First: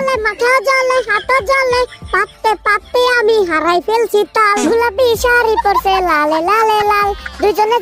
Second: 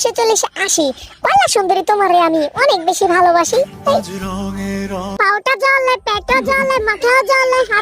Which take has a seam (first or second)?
second